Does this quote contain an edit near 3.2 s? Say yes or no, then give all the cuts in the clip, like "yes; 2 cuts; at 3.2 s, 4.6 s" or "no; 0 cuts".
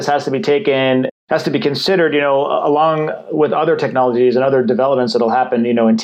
no; 1 cut; at 1.1 s